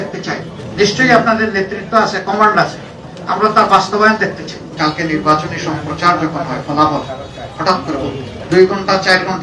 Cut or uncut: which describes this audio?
cut